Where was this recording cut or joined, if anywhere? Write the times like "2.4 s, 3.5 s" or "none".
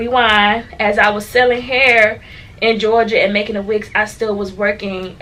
none